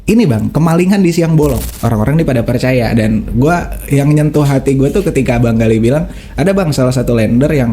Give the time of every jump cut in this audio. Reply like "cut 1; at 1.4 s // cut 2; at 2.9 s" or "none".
cut 1; at 1.7 s